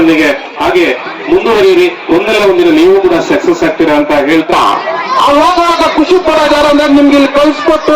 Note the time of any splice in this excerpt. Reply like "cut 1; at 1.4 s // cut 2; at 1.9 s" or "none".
cut 1; at 4.5 s